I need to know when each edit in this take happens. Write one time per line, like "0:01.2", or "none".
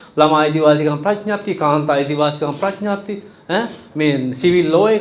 none